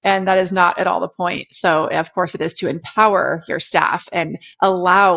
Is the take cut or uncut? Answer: uncut